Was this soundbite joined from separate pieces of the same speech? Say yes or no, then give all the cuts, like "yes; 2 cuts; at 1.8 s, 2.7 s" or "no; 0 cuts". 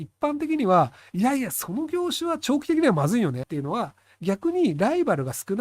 yes; 1 cut; at 3.4 s